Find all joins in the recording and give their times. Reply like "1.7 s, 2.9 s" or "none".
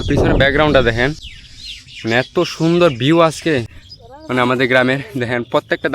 3.7 s